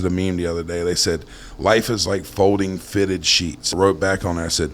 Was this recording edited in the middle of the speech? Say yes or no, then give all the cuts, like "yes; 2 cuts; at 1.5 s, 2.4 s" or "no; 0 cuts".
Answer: yes; 1 cut; at 3.7 s